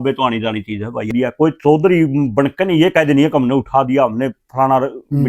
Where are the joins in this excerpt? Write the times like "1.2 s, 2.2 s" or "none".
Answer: 1.1 s